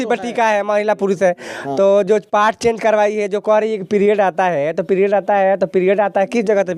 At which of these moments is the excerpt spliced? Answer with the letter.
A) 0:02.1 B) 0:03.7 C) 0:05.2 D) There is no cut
D